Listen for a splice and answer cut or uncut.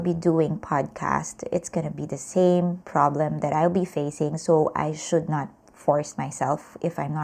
uncut